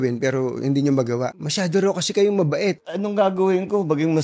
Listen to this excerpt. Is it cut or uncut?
cut